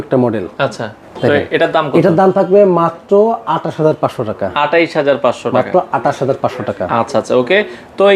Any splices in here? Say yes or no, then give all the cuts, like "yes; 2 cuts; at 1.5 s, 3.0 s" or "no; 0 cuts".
no; 0 cuts